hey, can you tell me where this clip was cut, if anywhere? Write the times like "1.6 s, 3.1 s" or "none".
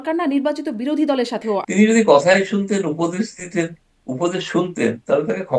1.7 s